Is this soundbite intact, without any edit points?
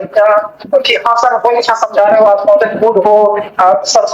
yes; 0 cuts

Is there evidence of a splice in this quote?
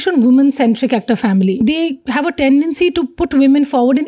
yes; 1 cut; at 1.5 s

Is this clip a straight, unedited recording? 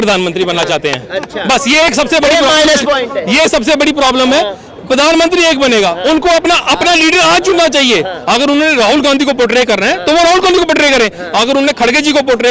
yes; 0 cuts

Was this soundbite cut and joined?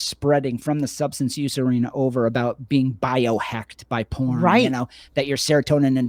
no; 0 cuts

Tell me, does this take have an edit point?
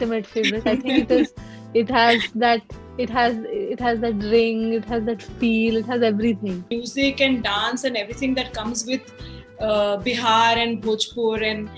yes; 1 cut; at 6.8 s

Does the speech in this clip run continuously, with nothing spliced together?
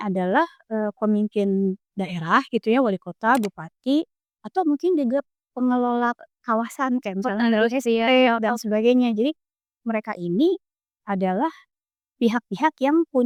yes; 0 cuts

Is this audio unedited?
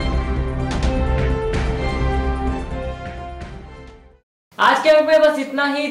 yes; 0 cuts

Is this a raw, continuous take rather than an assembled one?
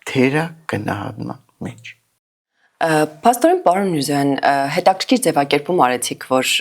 yes; 0 cuts

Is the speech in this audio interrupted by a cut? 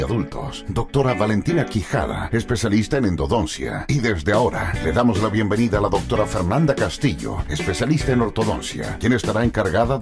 no; 0 cuts

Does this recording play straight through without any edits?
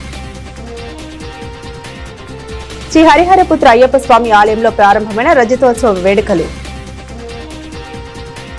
no; 1 cut; at 1.0 s

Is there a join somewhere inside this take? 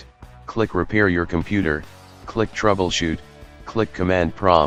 no; 0 cuts

